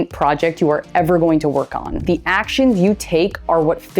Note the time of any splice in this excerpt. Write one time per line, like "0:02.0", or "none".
0:02.0